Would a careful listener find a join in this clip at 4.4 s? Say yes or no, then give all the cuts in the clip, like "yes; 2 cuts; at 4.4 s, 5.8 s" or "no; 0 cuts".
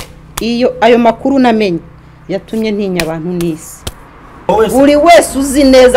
yes; 1 cut; at 4.4 s